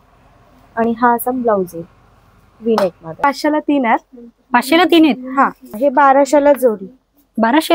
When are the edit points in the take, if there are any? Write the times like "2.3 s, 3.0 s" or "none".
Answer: 3.2 s, 5.7 s

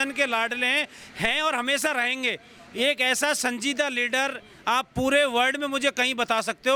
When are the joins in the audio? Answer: none

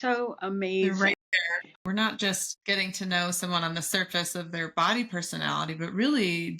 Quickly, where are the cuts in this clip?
1.8 s

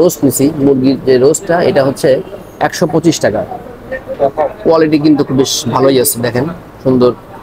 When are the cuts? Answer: 4.1 s

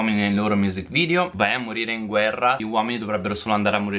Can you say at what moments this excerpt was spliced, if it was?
1.3 s

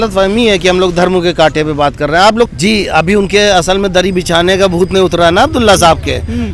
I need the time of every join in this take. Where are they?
2.5 s

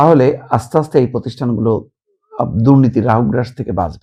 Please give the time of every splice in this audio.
none

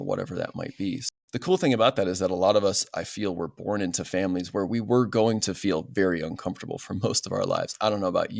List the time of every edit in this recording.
1.1 s

